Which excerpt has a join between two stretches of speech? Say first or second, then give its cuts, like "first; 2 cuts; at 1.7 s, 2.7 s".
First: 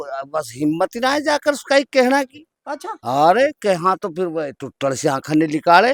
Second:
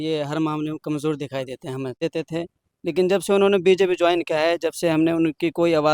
second; 1 cut; at 2.0 s